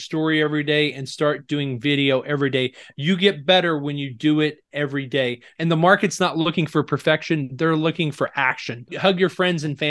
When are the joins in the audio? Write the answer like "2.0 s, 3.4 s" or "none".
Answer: 5.4 s, 8.9 s